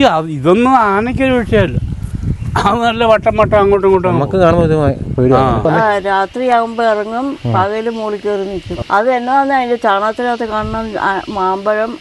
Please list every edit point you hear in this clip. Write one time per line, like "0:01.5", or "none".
0:05.6
0:08.7

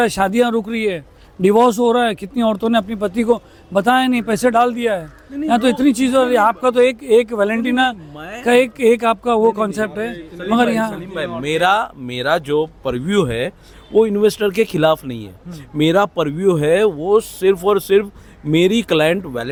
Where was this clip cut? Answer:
none

